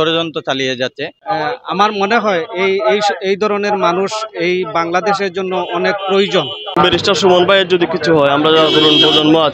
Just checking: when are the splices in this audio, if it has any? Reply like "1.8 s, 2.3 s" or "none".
1.1 s, 6.8 s